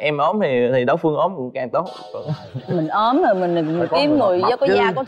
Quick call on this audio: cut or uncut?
uncut